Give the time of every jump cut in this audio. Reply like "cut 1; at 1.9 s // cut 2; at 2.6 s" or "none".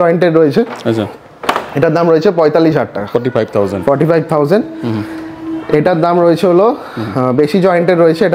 none